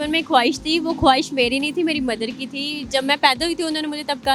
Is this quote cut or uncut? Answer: uncut